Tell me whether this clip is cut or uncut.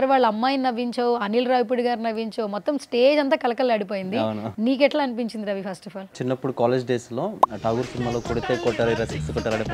cut